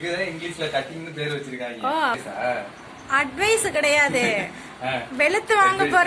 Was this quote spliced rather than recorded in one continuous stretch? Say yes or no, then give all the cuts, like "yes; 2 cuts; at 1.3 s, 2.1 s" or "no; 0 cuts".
yes; 1 cut; at 2.1 s